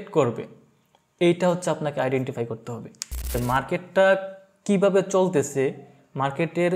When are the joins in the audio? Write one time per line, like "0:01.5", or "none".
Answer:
0:03.4